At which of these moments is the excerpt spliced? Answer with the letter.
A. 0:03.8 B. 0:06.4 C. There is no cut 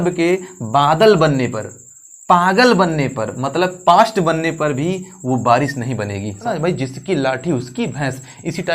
B